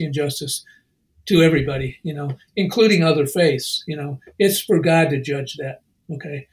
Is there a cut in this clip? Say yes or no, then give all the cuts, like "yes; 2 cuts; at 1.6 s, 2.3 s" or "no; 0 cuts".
no; 0 cuts